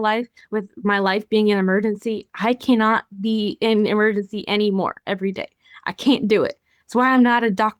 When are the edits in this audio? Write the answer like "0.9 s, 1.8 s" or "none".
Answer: none